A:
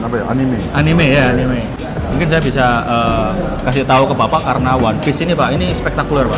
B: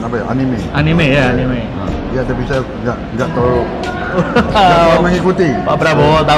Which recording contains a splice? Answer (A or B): A